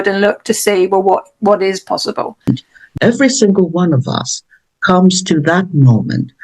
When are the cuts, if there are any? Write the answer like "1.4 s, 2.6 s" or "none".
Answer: 2.5 s